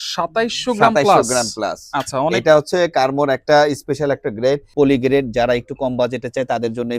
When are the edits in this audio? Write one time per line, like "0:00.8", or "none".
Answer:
0:04.7